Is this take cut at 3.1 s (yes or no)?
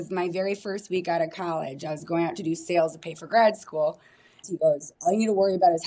no